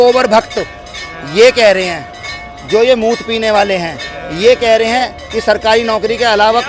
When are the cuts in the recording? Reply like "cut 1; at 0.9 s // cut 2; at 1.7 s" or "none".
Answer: none